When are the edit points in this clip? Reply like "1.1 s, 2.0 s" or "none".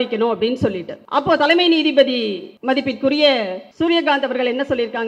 0.9 s, 2.5 s, 3.6 s

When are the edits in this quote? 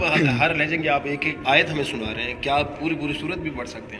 1.4 s

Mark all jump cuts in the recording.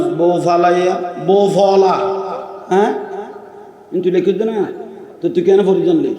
2.5 s

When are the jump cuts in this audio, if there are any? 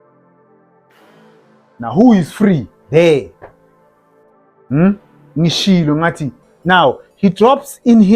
6.4 s

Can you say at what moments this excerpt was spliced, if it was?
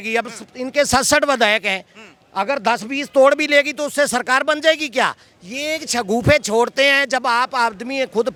none

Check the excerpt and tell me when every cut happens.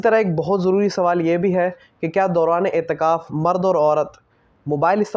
none

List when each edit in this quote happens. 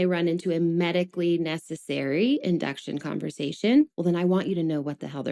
3.9 s

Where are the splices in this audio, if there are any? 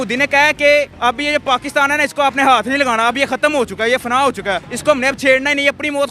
0.9 s, 4.7 s

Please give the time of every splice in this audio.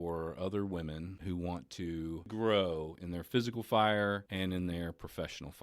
1.1 s, 2.3 s, 4.3 s

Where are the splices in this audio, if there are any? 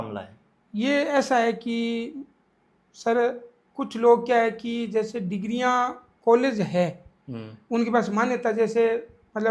none

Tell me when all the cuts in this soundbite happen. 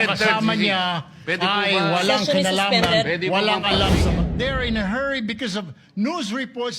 4.3 s

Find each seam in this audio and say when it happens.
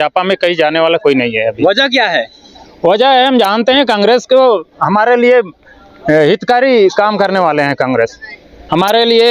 none

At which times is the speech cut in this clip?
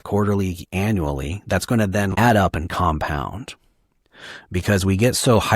2.1 s

